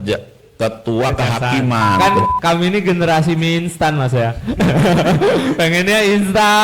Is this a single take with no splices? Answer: no; 1 cut; at 2.0 s

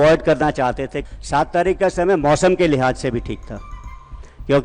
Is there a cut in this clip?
yes; 1 cut; at 1.0 s

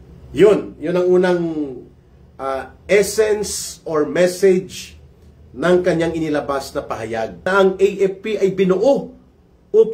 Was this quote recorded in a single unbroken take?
no; 1 cut; at 7.4 s

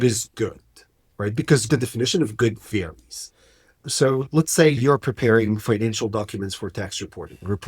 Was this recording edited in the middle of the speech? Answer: yes; 2 cuts; at 1.7 s, 4.8 s

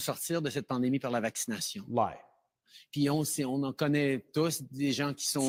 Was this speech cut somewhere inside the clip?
no; 0 cuts

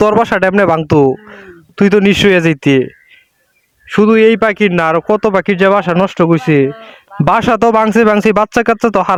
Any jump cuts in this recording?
no; 0 cuts

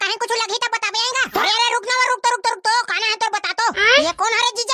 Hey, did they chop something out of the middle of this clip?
yes; 1 cut; at 1.4 s

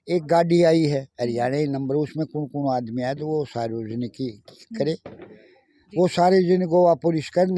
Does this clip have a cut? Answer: no; 0 cuts

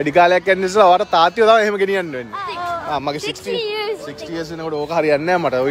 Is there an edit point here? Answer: yes; 1 cut; at 2.8 s

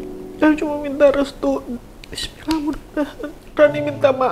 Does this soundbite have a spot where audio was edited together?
yes; 1 cut; at 1.8 s

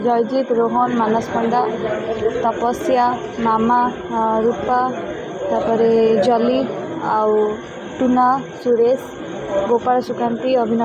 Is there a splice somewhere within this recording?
no; 0 cuts

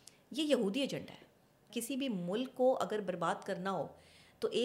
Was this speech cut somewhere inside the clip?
yes; 1 cut; at 1.7 s

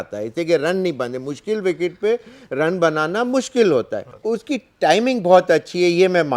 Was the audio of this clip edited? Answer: yes; 1 cut; at 4.0 s

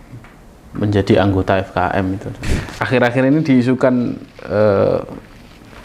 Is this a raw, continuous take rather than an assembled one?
no; 1 cut; at 2.3 s

